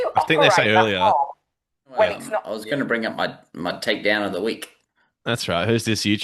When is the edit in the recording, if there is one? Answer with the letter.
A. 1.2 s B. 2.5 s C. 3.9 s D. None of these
B